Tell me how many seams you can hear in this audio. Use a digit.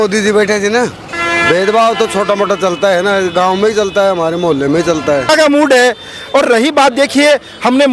2